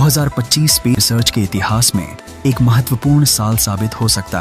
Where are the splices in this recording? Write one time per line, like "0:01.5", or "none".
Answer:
0:02.2